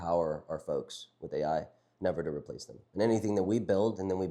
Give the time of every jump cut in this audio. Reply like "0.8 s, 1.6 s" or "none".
none